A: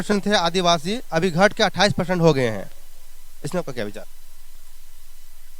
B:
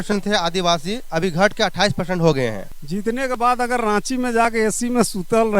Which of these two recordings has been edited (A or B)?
B